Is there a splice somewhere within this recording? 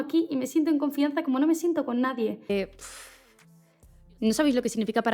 yes; 1 cut; at 2.5 s

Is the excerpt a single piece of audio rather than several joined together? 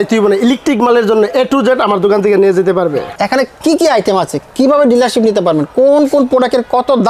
no; 1 cut; at 3.1 s

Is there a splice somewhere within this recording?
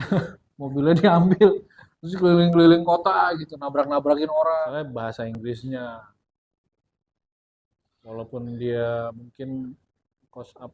yes; 1 cut; at 5.3 s

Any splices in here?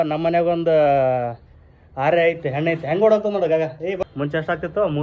yes; 1 cut; at 4.0 s

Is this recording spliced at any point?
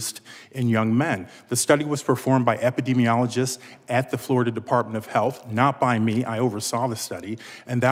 no; 0 cuts

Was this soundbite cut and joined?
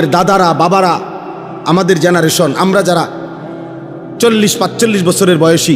no; 0 cuts

